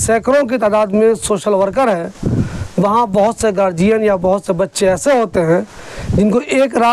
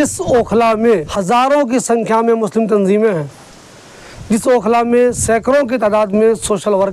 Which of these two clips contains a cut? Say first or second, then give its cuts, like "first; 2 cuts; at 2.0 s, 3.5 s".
second; 1 cut; at 1.1 s